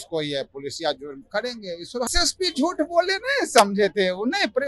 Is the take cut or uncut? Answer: cut